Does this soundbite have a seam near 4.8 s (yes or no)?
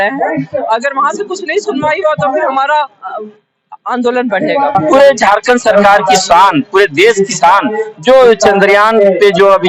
yes